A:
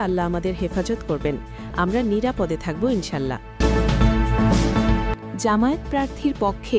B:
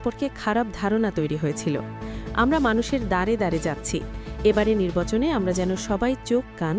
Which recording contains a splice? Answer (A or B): A